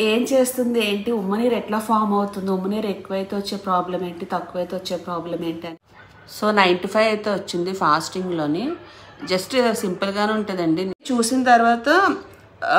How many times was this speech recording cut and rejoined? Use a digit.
2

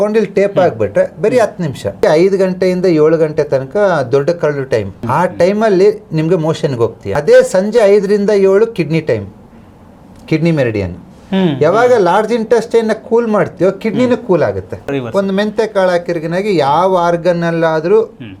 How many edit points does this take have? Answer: 4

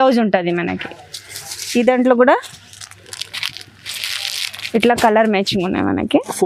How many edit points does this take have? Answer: 0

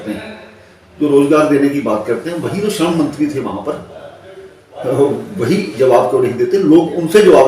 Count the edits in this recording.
0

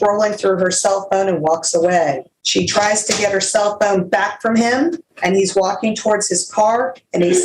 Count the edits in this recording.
2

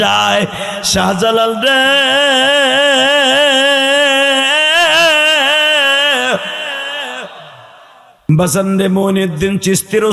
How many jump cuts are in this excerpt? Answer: 1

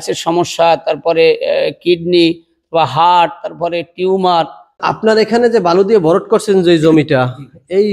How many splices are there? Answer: 1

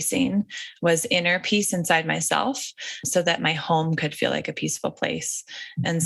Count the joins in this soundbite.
1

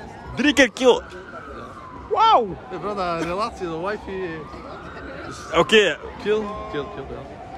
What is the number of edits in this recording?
0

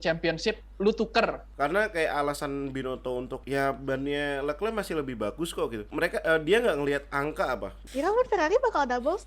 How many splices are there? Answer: 4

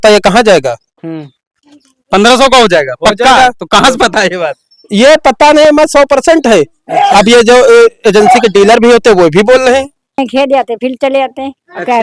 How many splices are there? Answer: 1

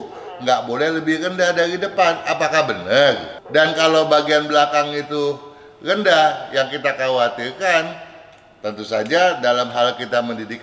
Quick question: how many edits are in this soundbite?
1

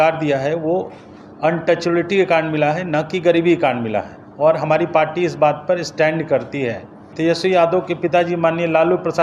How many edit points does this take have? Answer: 1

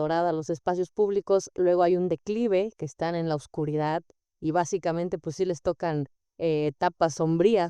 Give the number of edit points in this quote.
0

